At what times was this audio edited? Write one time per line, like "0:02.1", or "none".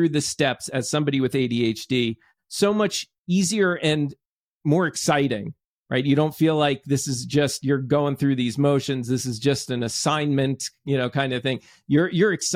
none